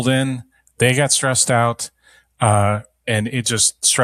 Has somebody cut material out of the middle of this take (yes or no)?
no